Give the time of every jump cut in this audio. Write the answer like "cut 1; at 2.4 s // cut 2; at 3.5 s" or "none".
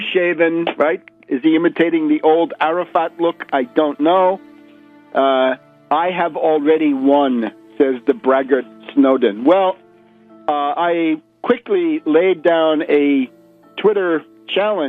cut 1; at 2.0 s